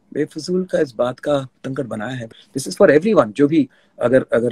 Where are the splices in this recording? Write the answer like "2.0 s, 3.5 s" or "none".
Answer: 2.3 s